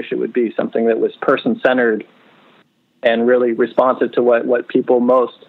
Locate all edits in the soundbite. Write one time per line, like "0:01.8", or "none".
none